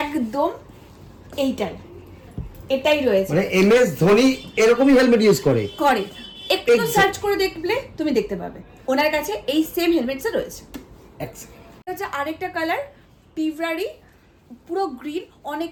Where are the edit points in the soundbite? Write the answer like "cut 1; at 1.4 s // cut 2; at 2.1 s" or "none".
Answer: none